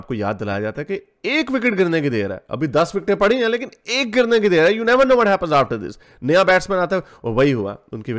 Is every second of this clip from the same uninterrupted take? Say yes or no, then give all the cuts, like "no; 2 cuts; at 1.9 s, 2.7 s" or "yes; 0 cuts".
yes; 0 cuts